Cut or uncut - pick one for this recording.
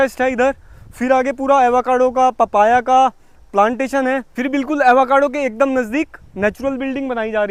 uncut